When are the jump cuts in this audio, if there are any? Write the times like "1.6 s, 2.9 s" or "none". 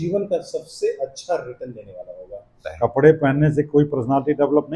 2.6 s